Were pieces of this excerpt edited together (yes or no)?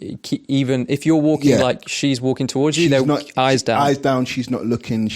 no